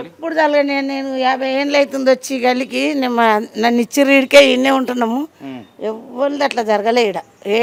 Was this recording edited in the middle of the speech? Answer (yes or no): no